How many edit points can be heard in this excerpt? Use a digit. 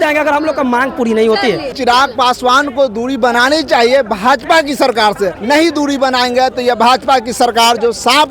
2